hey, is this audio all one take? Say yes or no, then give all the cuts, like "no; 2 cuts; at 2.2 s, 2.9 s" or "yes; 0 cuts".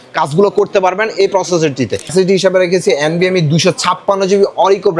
no; 1 cut; at 2.1 s